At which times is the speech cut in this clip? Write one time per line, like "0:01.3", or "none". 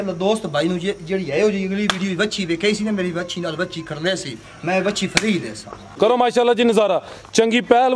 0:05.9